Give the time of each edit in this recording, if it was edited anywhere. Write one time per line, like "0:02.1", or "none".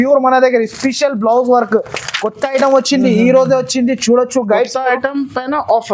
none